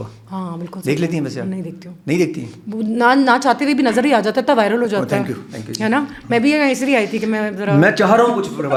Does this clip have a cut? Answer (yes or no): no